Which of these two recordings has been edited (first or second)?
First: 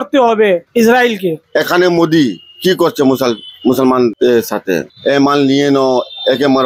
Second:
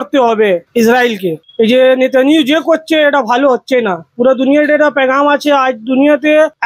first